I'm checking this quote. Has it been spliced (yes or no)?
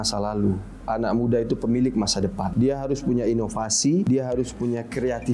yes